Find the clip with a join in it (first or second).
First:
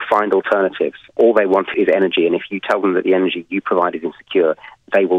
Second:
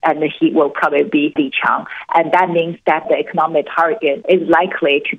second